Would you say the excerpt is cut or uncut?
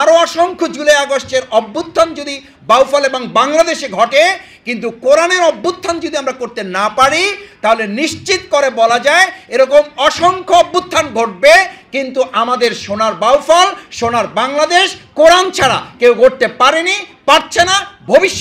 uncut